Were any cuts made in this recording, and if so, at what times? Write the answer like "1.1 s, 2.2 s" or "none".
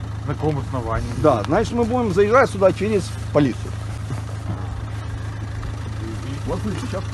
none